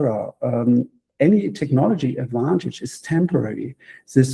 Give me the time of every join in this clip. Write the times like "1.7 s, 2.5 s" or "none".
1.0 s